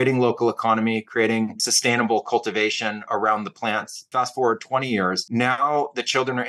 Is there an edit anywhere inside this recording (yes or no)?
yes